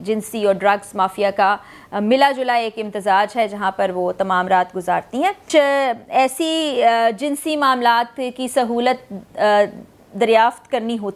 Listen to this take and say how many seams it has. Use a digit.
1